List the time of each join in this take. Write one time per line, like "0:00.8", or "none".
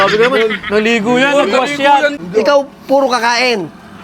0:02.2